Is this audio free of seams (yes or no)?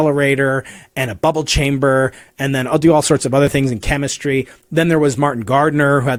yes